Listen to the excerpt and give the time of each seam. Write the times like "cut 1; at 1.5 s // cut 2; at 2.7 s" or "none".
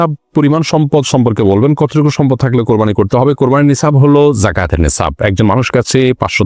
none